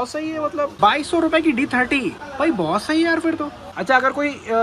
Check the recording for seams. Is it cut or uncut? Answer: cut